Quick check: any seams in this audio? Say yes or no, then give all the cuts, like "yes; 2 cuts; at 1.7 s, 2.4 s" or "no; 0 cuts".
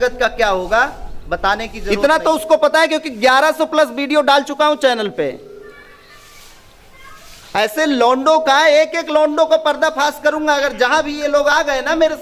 yes; 1 cut; at 1.7 s